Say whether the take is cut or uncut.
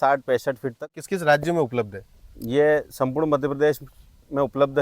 cut